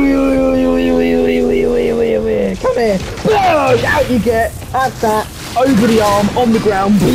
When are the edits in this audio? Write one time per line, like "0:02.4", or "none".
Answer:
none